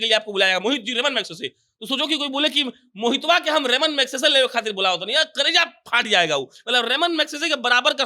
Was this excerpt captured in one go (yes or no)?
yes